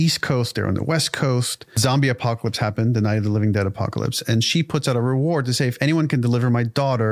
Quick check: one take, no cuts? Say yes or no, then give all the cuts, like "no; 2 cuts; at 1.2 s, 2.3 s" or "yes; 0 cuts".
no; 1 cut; at 1.8 s